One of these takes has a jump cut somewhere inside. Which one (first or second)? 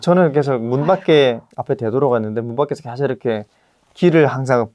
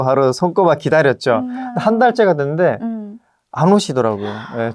first